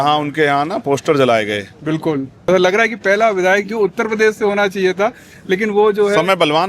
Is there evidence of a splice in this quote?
yes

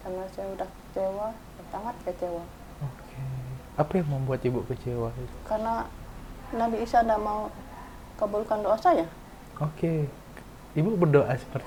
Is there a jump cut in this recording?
no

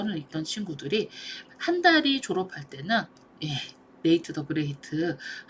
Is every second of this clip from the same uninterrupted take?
yes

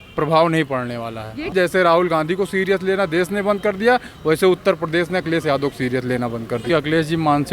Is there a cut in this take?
yes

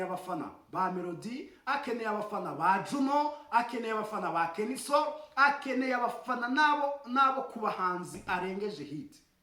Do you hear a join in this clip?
no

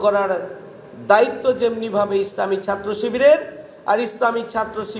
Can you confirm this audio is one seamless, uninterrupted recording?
yes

